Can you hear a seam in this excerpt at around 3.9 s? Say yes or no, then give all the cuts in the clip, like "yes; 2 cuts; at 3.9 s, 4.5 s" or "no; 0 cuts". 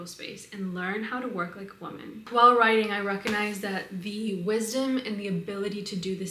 no; 1 cut; at 2.2 s